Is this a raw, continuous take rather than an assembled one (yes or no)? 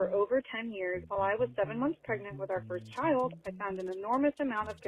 no